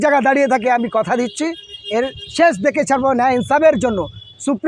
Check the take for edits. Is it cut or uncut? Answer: uncut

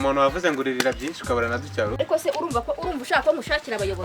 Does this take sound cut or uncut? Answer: cut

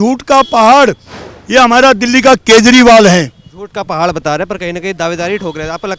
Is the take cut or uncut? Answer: uncut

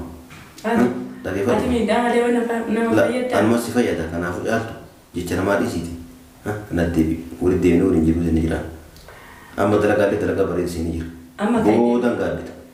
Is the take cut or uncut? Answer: uncut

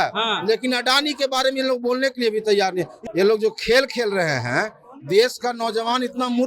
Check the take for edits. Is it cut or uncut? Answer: cut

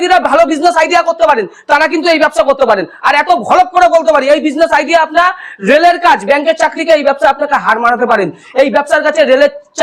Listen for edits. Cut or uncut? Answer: uncut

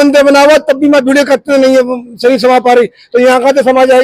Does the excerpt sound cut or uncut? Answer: uncut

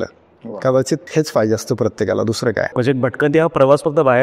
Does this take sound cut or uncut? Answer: cut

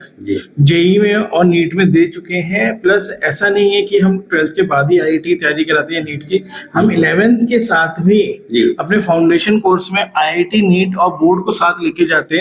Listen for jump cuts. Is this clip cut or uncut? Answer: uncut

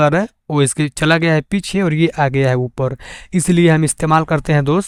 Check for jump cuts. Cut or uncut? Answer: uncut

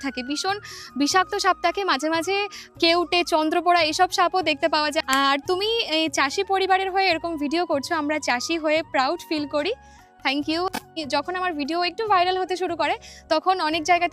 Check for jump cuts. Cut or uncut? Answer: cut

